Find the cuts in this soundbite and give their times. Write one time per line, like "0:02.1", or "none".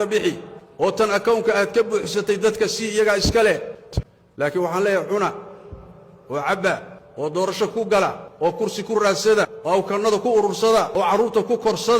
0:03.8

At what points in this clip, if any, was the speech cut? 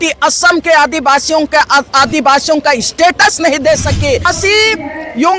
0:04.3

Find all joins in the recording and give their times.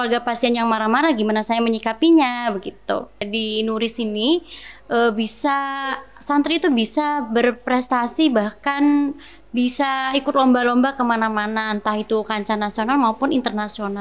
0:03.3

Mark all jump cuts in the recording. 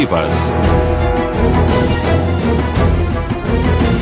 0:02.2

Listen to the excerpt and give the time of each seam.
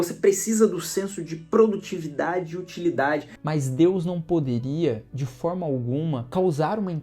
0:03.3
0:06.2

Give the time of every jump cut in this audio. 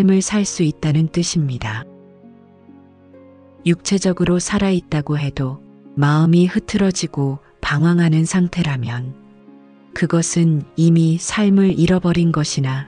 none

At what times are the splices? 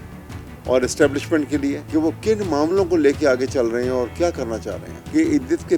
0:01.8

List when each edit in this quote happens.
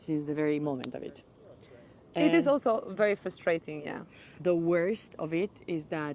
none

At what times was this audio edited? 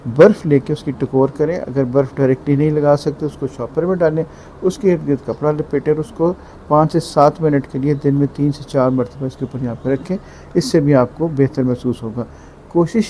none

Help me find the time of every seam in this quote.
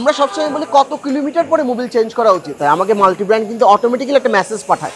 0:02.5

